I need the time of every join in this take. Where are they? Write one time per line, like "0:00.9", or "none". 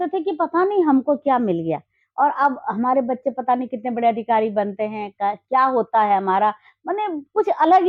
none